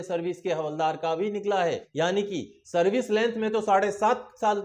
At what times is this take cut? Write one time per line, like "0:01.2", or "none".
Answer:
0:01.8